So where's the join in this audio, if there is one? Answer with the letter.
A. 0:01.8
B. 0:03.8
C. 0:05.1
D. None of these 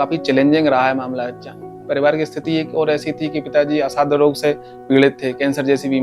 A